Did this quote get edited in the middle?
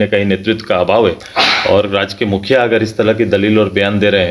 yes; 1 cut; at 1.3 s

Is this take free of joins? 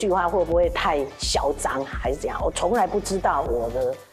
yes; 0 cuts

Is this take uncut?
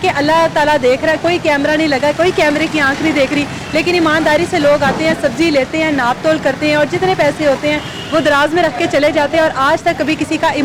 yes; 0 cuts

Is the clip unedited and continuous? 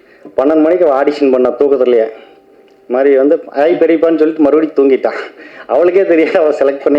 yes; 0 cuts

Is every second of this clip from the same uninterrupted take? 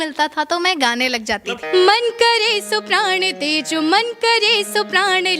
no; 1 cut; at 1.5 s

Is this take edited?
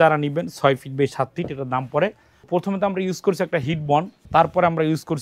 yes; 2 cuts; at 2.5 s, 4.2 s

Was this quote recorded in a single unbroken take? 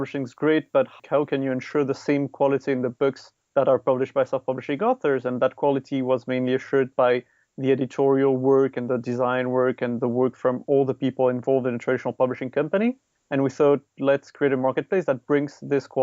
no; 2 cuts; at 1.0 s, 13.1 s

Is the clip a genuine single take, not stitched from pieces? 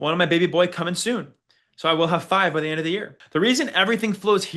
no; 1 cut; at 3.2 s

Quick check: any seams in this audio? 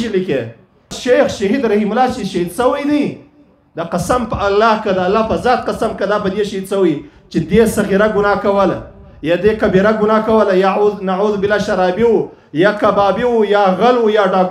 yes; 1 cut; at 1.0 s

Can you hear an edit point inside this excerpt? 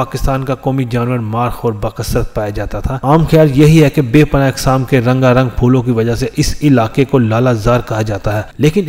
yes; 1 cut; at 2.9 s

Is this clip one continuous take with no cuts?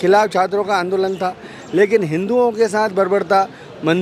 yes; 0 cuts

